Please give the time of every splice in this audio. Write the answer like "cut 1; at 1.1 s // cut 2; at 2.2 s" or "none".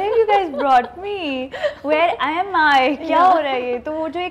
none